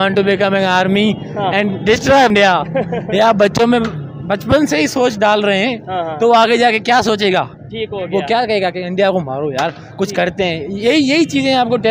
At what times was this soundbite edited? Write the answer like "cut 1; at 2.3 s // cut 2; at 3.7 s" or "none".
cut 1; at 2.3 s

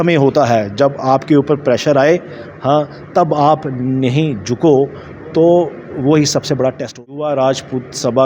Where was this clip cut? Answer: cut 1; at 7.1 s

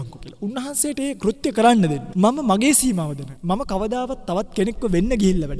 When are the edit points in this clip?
cut 1; at 2.0 s // cut 2; at 3.3 s

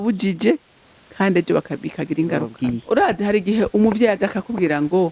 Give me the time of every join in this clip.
cut 1; at 2.5 s

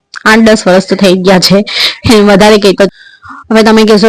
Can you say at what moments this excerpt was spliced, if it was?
cut 1; at 2.9 s

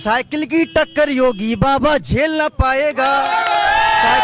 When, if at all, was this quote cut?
none

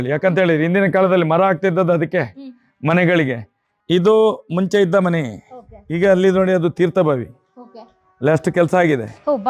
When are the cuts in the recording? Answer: cut 1; at 3.6 s

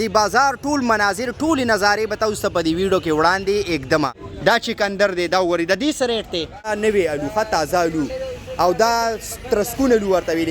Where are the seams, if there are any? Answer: cut 1; at 4.2 s // cut 2; at 6.7 s

